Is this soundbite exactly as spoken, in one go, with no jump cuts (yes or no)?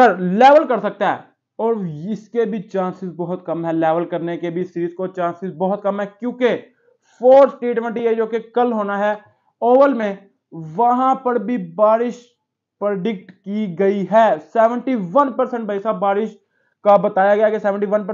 yes